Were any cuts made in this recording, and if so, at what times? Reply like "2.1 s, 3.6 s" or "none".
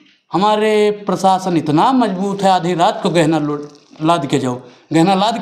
none